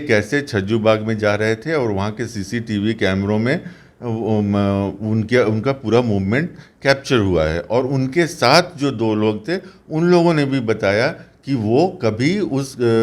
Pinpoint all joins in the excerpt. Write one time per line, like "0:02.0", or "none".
none